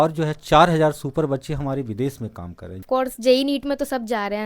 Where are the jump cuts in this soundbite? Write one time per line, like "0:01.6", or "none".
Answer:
0:02.8